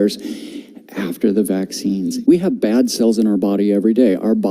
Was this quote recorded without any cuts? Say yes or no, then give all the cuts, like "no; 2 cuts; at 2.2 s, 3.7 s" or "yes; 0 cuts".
yes; 0 cuts